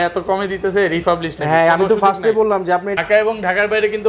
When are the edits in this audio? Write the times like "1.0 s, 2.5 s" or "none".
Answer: 3.0 s